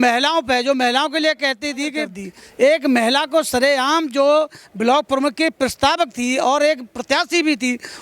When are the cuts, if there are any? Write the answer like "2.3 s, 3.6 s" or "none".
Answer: 2.1 s